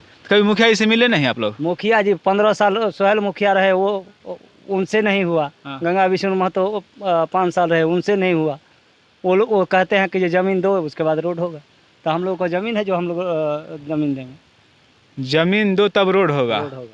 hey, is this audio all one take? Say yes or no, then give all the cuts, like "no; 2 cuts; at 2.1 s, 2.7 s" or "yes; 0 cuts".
yes; 0 cuts